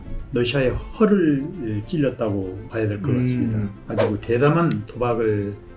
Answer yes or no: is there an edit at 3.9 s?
yes